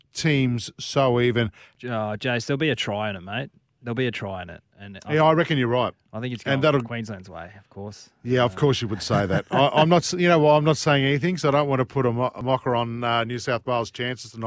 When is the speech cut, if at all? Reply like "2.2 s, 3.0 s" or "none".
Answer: 1.7 s